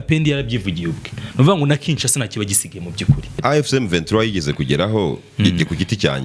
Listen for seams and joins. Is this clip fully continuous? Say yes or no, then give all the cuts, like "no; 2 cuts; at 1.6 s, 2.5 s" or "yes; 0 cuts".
no; 1 cut; at 3.4 s